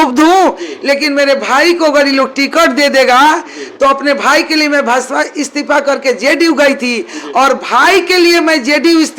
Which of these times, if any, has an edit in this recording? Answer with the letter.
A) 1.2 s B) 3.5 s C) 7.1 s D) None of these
D